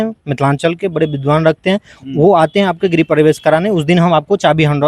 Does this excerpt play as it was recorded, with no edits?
yes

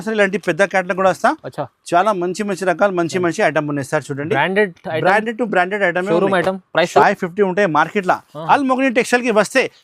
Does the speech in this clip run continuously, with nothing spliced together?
no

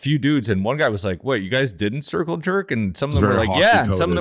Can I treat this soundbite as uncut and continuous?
yes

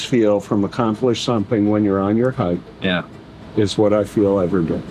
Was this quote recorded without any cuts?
yes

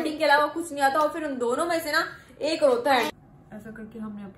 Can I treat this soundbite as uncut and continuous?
no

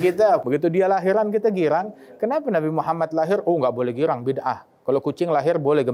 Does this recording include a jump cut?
no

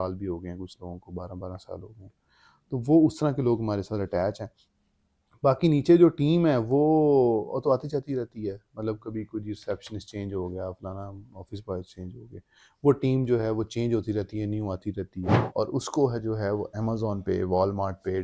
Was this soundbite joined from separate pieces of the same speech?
yes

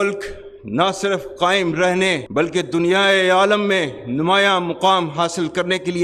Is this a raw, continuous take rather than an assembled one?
yes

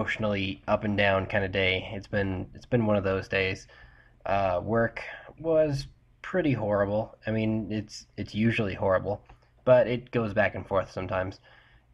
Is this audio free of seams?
yes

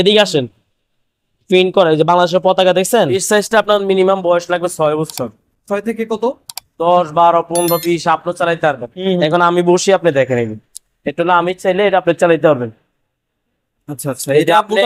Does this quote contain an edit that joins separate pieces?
yes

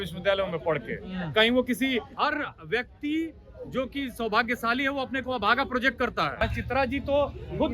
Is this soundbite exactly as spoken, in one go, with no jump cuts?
no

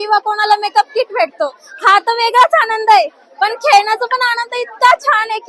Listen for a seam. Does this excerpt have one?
no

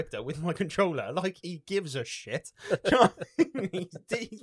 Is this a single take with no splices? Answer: yes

